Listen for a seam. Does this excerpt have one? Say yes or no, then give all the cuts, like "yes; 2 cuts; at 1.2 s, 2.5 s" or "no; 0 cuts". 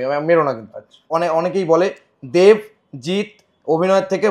yes; 1 cut; at 1.1 s